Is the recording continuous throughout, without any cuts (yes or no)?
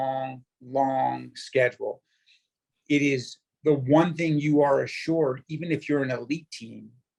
yes